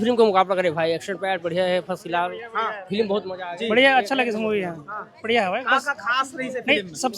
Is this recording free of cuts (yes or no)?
yes